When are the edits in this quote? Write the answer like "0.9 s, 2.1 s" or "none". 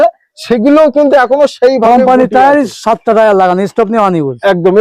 none